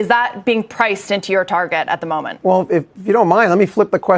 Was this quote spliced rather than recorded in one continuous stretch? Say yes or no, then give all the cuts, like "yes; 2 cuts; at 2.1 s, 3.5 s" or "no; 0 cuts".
yes; 1 cut; at 2.3 s